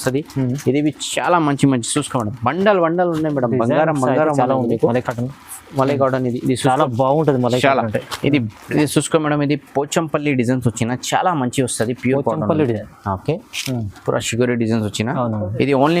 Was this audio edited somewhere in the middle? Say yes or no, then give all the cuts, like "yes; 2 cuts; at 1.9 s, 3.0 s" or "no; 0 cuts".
yes; 1 cut; at 8.6 s